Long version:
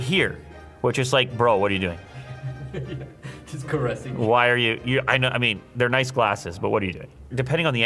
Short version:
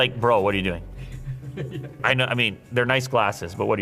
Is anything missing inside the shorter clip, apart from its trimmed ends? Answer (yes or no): yes